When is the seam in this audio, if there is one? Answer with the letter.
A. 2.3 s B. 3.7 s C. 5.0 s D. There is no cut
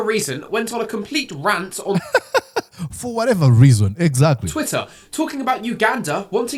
D